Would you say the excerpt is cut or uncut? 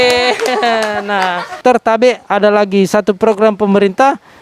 cut